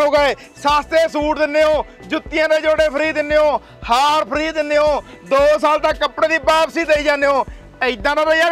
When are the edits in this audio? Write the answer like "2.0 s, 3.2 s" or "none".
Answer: none